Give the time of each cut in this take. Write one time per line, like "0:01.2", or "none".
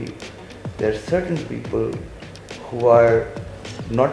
none